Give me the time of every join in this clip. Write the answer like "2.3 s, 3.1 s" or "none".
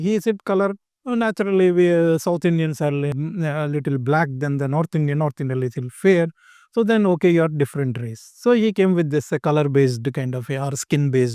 none